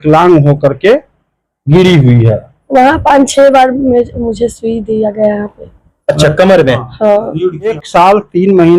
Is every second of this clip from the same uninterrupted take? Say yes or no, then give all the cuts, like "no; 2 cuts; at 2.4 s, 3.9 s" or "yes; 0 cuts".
no; 2 cuts; at 2.5 s, 7.8 s